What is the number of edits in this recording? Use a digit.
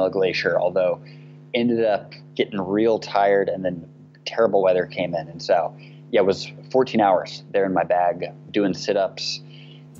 0